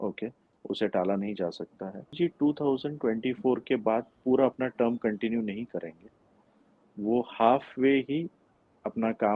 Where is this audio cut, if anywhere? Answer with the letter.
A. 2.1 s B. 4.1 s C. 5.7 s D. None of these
A